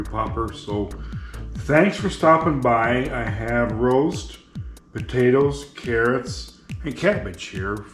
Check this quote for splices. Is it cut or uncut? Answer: uncut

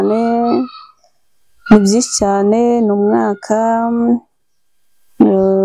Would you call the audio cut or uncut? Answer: uncut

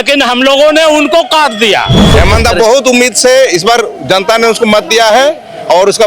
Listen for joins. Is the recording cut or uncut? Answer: cut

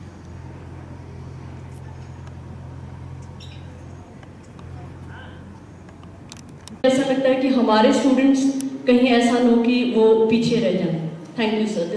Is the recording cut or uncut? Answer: uncut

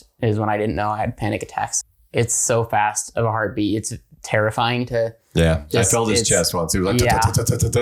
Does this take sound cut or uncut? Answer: cut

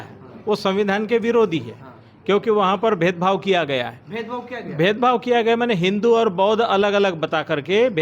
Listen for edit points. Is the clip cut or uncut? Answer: uncut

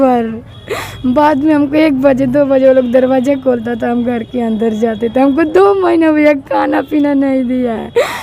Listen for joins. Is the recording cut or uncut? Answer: uncut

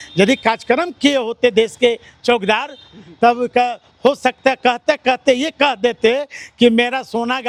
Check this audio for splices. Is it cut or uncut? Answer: uncut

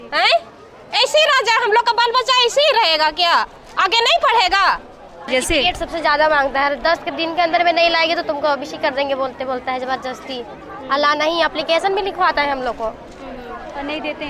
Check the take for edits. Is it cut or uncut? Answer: cut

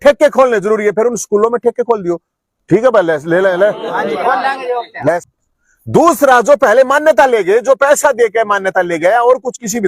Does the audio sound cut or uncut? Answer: cut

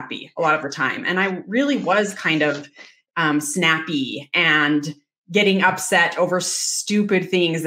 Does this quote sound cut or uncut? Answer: uncut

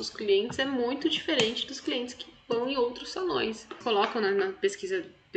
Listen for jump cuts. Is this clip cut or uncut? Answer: cut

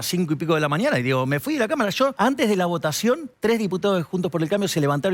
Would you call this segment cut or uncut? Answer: cut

